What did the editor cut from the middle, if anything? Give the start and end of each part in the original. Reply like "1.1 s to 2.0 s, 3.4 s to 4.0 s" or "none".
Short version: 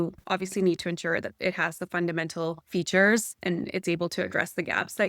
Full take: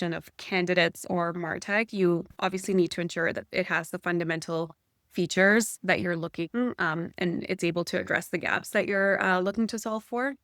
4.7 s to 5.1 s, 5.8 s to 7.1 s